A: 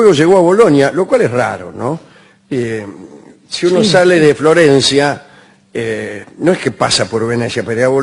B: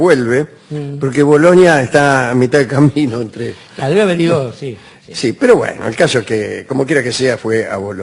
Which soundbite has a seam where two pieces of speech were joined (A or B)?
B